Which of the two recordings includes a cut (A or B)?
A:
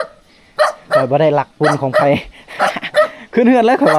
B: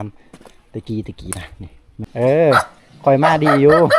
B